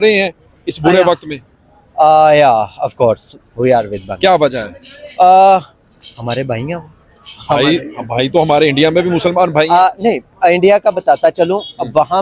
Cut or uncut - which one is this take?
uncut